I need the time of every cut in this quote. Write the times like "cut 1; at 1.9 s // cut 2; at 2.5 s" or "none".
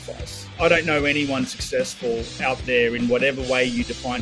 none